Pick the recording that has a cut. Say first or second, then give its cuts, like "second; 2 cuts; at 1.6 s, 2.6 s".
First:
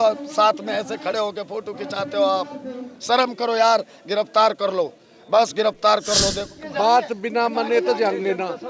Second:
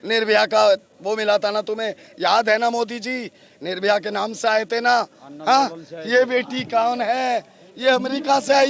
first; 1 cut; at 6.7 s